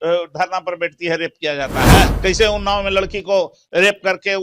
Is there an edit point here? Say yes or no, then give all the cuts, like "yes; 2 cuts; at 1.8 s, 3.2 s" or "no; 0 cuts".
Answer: yes; 1 cut; at 2.1 s